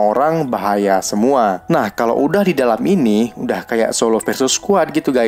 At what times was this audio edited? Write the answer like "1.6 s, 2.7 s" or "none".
1.6 s